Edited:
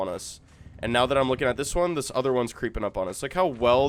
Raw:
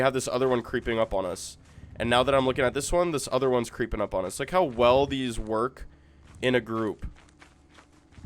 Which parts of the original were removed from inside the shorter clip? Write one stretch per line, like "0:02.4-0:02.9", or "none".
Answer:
none

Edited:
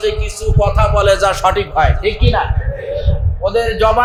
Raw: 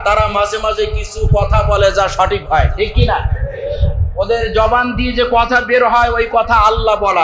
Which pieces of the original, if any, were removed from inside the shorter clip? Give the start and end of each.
none

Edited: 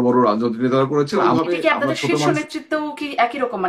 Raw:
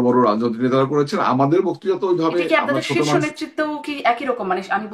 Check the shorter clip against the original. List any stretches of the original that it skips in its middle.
0:01.2-0:02.1

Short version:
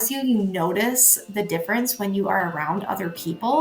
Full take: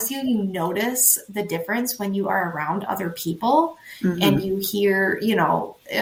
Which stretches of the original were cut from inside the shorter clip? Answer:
none

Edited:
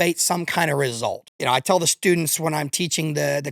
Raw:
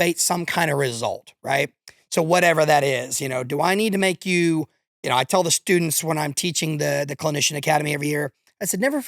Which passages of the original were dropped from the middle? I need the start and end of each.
0:01.3-0:04.9

